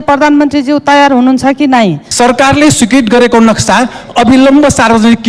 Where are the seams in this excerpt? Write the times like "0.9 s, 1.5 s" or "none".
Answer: 2.0 s